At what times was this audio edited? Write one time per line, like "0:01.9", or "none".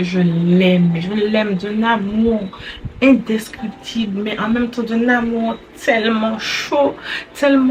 none

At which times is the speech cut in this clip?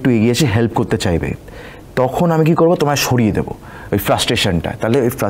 none

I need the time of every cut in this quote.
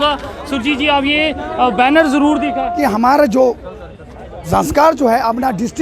0:02.8

